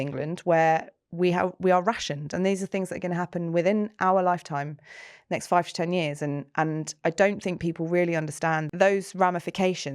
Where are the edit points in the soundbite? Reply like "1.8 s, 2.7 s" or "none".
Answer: 8.7 s